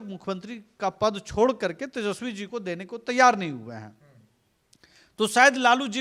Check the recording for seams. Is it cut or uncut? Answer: uncut